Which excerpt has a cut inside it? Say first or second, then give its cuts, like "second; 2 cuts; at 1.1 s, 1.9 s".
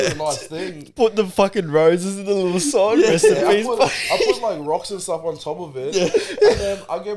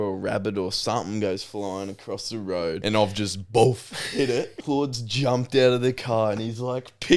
second; 2 cuts; at 2.8 s, 4.5 s